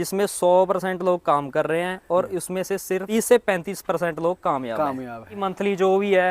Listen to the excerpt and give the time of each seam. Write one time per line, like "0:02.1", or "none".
0:03.1
0:05.4